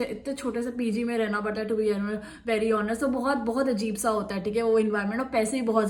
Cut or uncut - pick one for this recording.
uncut